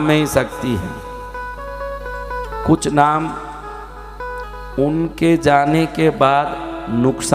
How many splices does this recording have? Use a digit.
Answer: 0